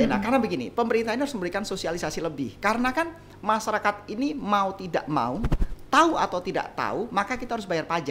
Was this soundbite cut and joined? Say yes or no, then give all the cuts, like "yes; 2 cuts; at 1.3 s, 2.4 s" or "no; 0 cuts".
no; 0 cuts